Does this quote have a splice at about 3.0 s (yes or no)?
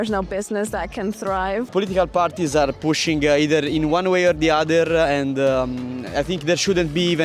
no